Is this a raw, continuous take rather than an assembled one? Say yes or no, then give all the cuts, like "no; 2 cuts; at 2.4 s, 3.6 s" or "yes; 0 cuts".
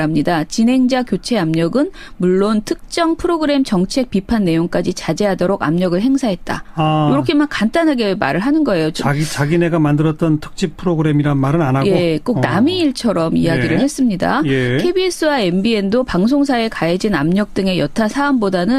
no; 1 cut; at 15.7 s